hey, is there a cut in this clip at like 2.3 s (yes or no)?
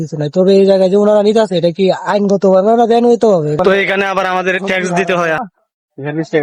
no